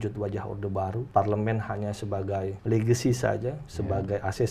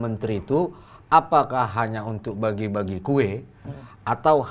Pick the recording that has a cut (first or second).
first